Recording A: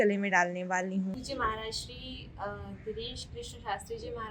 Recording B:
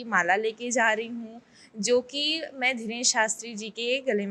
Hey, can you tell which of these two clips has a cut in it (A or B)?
A